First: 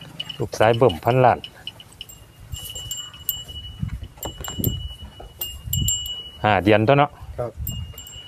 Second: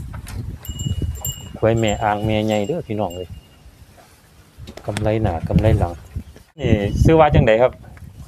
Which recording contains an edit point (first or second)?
second